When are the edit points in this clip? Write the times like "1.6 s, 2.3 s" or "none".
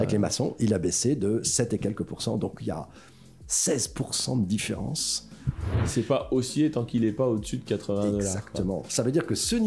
5.8 s